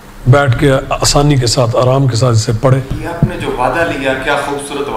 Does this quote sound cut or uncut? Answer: cut